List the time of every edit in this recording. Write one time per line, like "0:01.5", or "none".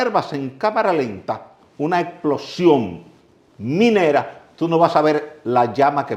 none

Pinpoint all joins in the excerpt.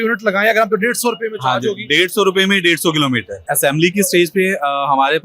0:03.5

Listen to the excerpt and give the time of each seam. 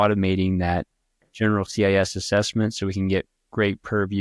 none

